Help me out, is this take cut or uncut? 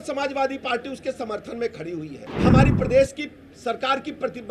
cut